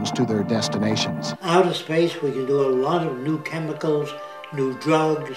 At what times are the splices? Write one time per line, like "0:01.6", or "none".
none